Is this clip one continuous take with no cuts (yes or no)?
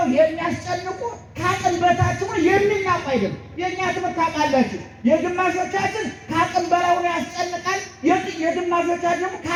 yes